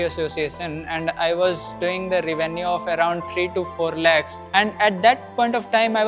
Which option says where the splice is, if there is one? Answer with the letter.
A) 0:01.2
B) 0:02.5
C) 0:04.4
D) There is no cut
C